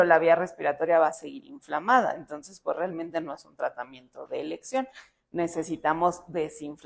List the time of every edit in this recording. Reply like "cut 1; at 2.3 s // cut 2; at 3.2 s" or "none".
none